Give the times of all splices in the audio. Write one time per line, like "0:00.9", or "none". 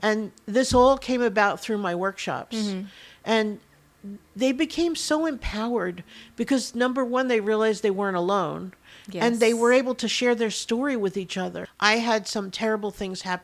0:11.6